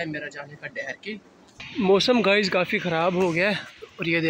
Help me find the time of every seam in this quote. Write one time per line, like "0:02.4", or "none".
0:01.7